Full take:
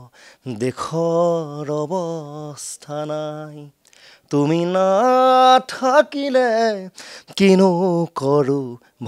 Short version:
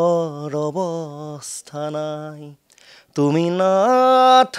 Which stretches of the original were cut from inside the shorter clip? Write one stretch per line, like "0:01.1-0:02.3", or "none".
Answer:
none